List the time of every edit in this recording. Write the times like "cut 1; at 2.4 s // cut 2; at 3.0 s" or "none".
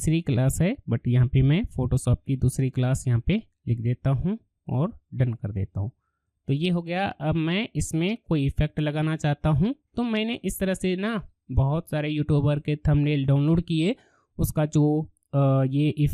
none